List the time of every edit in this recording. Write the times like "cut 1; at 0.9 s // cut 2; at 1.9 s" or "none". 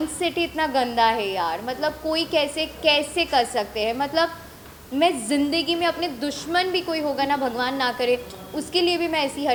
none